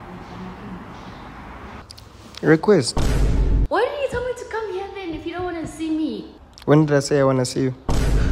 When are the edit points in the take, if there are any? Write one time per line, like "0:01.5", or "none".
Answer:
0:03.6